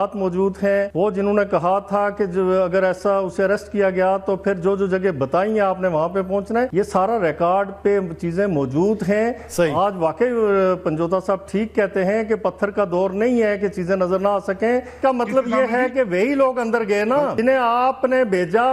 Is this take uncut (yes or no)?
no